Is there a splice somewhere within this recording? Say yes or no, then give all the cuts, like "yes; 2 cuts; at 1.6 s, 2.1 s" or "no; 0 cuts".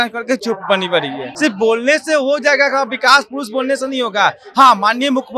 yes; 1 cut; at 1.3 s